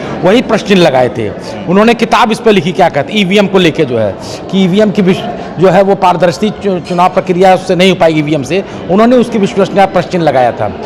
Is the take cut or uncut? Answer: uncut